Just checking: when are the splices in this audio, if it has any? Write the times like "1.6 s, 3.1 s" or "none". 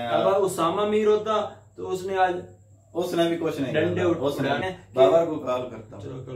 4.6 s